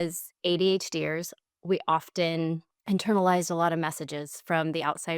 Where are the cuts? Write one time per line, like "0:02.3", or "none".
0:02.7